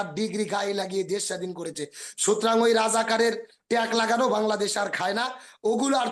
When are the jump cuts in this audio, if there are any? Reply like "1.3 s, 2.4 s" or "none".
none